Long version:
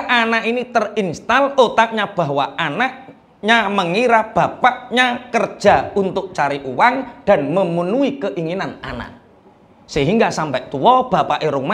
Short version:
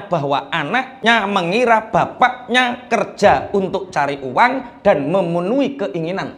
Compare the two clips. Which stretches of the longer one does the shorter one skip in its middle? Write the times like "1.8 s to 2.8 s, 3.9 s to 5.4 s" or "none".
3.0 s to 3.3 s